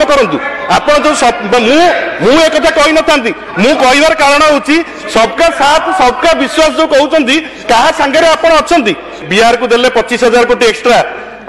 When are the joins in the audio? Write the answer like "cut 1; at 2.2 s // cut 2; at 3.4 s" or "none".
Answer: cut 1; at 9.3 s